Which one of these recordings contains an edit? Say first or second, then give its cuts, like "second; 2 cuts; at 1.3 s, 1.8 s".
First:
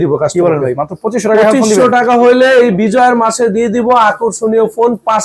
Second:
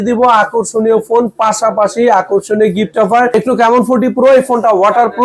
second; 1 cut; at 3.3 s